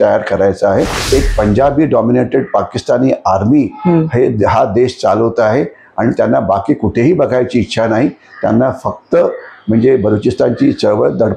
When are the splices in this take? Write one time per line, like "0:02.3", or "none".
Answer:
0:01.0